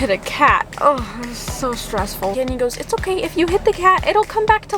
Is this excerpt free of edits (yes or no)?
no